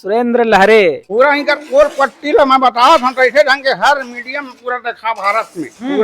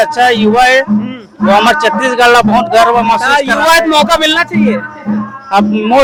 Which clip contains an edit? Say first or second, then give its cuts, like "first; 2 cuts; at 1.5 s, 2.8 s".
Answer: first; 1 cut; at 1.0 s